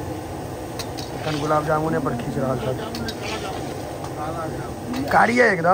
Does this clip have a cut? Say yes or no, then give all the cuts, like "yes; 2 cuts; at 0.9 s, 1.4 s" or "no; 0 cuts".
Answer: no; 0 cuts